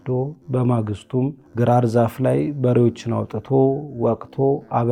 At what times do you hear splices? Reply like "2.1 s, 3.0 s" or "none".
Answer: 1.4 s